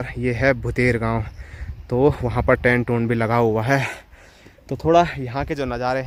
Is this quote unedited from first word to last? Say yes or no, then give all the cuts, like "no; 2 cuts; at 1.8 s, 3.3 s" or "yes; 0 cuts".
yes; 0 cuts